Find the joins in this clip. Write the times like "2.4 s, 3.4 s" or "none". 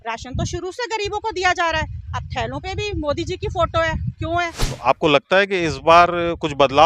4.6 s

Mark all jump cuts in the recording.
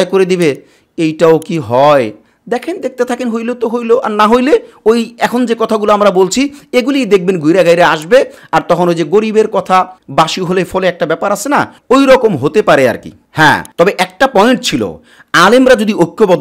none

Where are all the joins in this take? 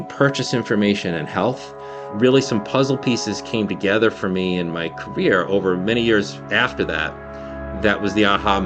none

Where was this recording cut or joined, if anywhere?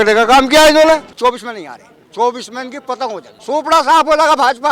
1.1 s, 3.3 s

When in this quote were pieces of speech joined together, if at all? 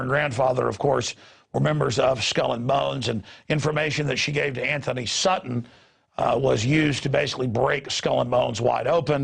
6.6 s

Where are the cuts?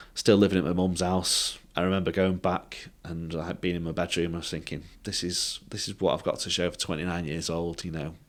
none

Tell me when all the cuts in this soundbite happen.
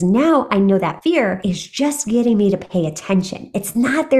1.1 s

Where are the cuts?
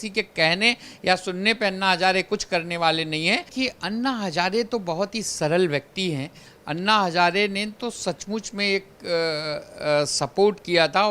3.5 s

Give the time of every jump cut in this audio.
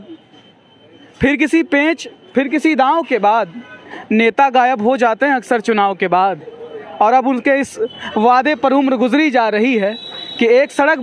none

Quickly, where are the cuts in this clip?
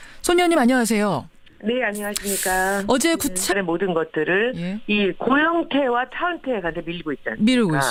none

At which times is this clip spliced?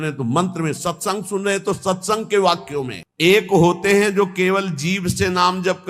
3.0 s

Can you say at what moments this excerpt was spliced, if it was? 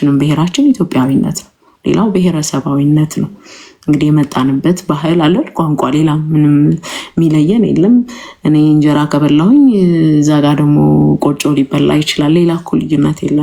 none

